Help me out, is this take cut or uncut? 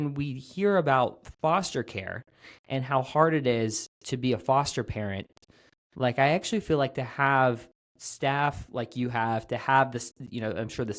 uncut